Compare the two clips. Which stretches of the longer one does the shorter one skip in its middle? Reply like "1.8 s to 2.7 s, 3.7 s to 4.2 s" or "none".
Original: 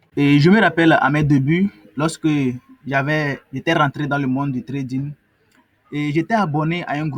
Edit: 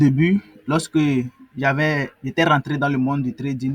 none